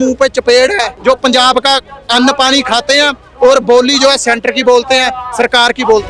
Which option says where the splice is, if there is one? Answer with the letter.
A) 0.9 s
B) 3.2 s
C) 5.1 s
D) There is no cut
A